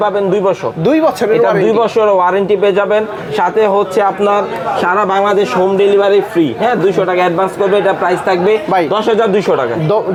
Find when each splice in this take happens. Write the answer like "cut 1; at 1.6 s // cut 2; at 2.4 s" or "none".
none